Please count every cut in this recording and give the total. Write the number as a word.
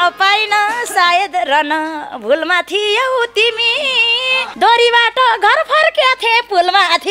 one